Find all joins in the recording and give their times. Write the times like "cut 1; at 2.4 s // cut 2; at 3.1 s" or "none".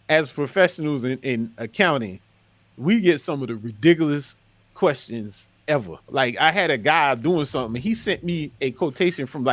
cut 1; at 6.1 s